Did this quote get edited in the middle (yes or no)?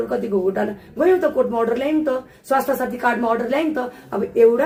no